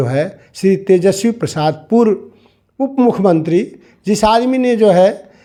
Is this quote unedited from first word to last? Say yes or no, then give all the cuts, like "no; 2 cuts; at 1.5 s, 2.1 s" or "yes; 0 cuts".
yes; 0 cuts